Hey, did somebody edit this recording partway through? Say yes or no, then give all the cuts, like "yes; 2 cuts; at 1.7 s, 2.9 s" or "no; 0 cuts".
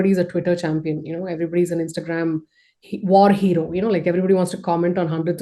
no; 0 cuts